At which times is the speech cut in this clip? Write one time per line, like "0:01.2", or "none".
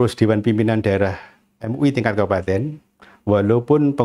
none